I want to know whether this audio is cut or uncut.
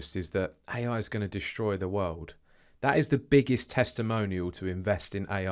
uncut